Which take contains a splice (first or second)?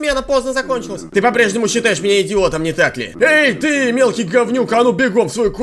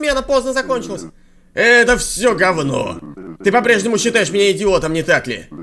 first